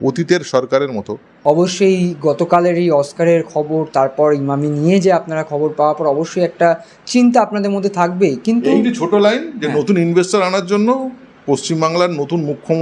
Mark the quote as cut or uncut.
cut